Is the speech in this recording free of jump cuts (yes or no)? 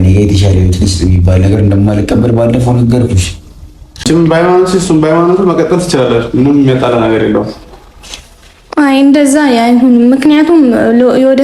no